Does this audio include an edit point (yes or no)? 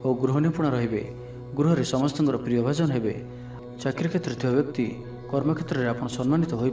no